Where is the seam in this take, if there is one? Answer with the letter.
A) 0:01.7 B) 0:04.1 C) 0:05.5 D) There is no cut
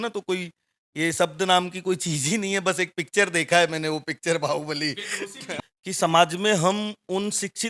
C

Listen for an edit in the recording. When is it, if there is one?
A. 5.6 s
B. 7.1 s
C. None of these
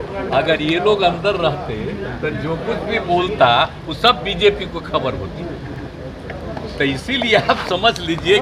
C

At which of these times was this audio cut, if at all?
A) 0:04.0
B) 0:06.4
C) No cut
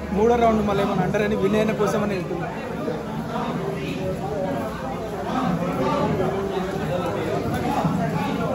C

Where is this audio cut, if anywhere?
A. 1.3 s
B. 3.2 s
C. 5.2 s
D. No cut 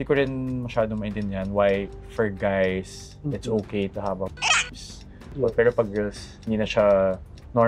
C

